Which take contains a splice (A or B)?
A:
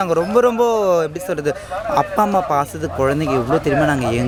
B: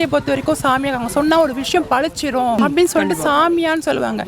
B